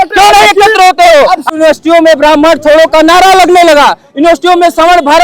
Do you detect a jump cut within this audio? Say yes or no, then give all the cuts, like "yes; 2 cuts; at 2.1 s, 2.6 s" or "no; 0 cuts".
yes; 1 cut; at 1.5 s